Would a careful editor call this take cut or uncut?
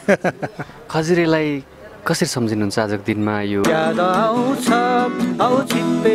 cut